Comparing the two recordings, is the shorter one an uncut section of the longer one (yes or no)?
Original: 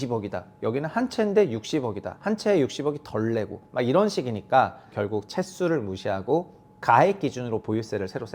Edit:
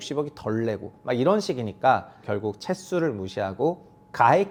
yes